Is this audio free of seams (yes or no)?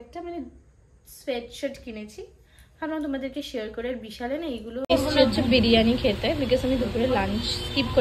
no